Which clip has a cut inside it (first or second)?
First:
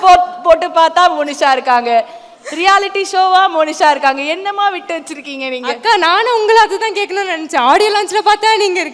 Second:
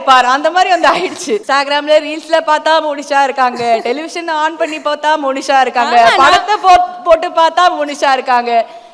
second